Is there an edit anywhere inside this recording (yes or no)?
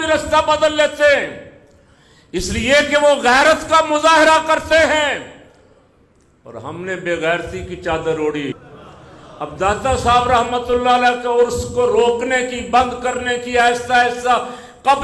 yes